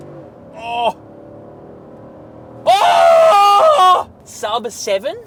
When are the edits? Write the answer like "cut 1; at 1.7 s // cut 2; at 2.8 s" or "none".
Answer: none